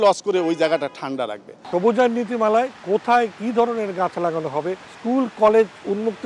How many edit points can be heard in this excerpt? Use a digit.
2